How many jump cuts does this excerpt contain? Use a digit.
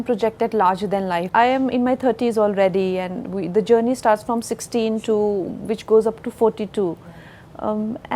1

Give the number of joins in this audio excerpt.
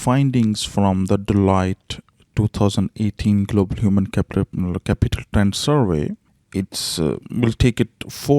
1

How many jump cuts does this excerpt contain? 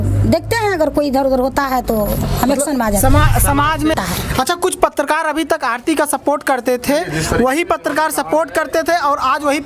1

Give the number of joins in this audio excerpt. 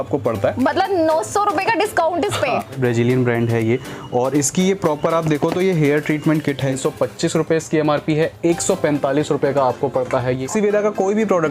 3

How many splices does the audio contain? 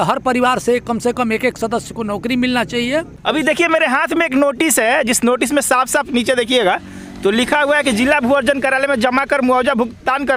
0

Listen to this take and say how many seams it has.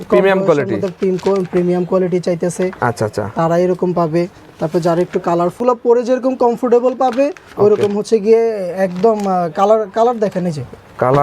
1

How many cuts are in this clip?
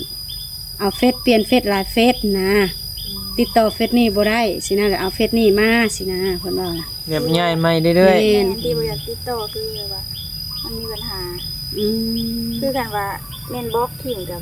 0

